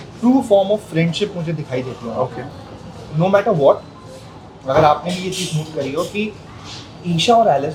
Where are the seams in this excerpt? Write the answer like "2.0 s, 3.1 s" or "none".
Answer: none